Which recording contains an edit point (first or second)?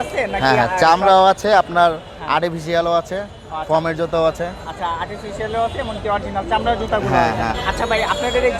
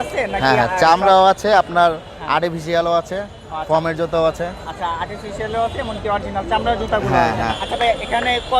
second